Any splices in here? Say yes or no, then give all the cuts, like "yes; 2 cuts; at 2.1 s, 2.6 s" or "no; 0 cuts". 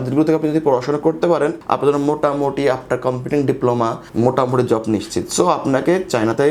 no; 0 cuts